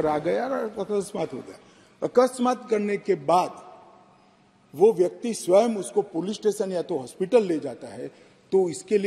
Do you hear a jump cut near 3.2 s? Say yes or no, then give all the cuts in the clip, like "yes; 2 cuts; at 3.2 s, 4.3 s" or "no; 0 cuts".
no; 0 cuts